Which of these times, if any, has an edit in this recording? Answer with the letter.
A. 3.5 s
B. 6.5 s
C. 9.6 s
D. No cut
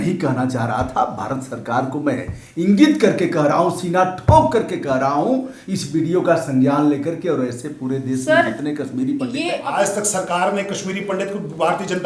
C